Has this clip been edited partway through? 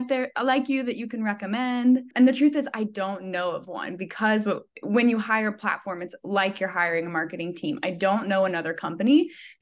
yes; 1 cut; at 2.1 s

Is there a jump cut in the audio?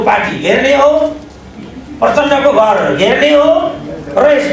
no; 0 cuts

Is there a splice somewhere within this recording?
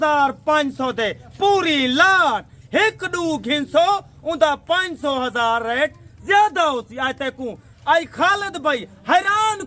no; 0 cuts

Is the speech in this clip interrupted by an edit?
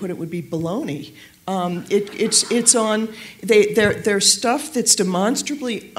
no; 0 cuts

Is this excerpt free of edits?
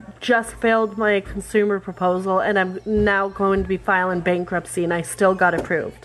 yes; 0 cuts

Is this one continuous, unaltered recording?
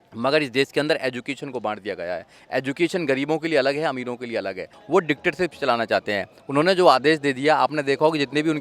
no; 1 cut; at 4.7 s

